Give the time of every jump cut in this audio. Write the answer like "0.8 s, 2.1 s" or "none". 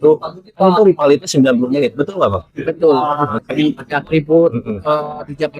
3.4 s